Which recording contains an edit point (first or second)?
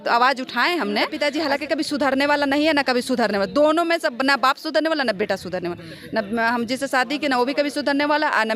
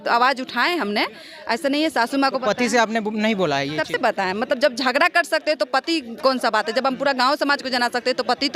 first